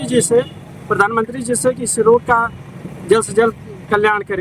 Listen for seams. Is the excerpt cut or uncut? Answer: uncut